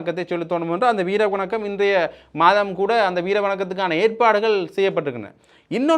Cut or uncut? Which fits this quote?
uncut